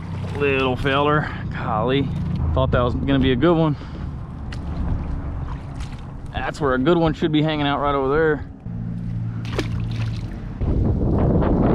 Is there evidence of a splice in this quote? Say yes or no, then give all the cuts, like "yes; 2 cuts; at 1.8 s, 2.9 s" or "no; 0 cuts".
yes; 3 cuts; at 2.4 s, 8.6 s, 10.6 s